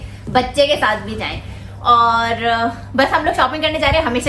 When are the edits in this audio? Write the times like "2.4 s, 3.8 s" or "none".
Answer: none